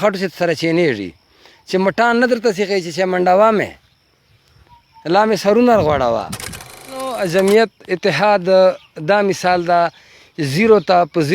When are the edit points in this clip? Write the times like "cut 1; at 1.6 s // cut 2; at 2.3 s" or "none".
cut 1; at 6.9 s